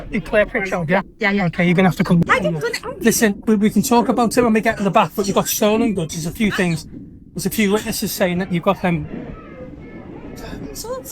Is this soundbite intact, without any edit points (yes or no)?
no